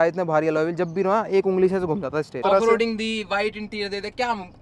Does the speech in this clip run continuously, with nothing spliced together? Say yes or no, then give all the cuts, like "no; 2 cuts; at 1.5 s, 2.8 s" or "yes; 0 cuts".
no; 1 cut; at 2.4 s